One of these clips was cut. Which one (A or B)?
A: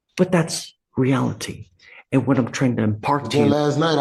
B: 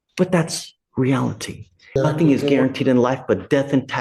B